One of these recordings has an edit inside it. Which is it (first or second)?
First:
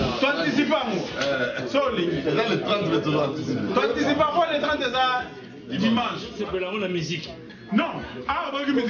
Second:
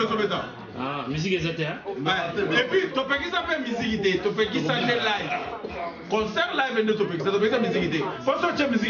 first